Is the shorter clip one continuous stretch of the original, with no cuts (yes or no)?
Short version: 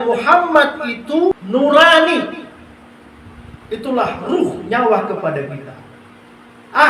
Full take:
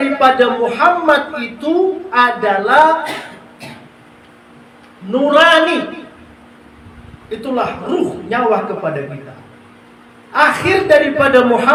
no